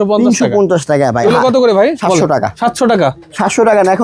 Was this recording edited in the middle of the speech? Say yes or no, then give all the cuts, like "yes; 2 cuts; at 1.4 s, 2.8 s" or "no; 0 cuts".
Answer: yes; 2 cuts; at 1.2 s, 2.2 s